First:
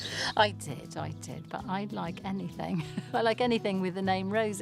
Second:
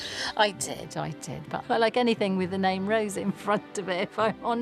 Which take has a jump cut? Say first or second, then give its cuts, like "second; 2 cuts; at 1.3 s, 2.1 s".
second; 1 cut; at 1.6 s